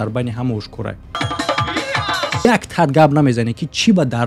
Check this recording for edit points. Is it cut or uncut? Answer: cut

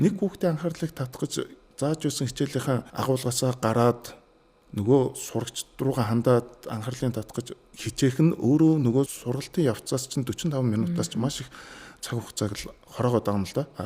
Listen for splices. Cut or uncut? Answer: cut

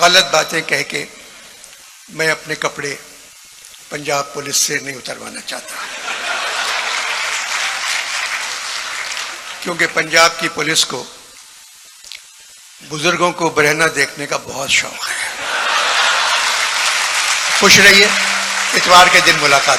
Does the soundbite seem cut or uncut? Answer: uncut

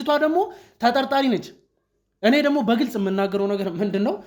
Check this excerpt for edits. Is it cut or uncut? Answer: uncut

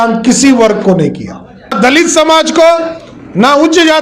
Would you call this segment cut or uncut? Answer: cut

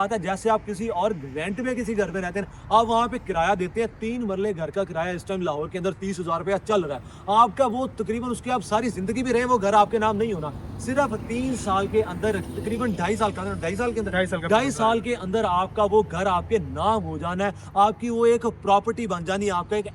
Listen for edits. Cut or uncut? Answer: uncut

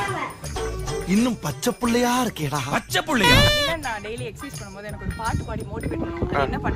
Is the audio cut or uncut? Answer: cut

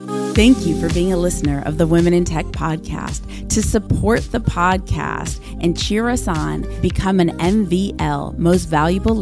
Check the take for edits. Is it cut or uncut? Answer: uncut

